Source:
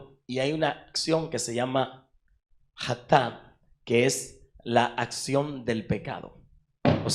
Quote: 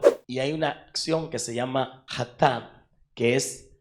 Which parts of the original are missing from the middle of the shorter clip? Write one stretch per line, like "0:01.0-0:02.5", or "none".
0:02.0-0:02.7